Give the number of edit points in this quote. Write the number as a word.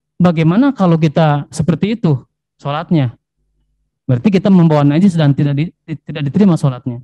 zero